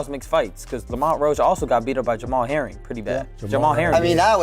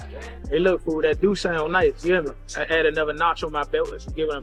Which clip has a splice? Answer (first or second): first